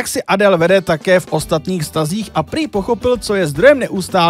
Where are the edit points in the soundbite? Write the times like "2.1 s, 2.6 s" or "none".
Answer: none